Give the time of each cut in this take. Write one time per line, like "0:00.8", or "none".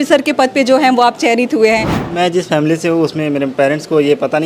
0:01.9